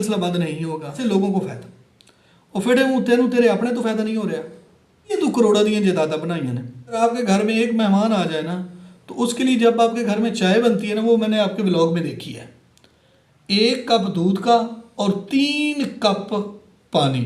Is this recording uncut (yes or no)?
no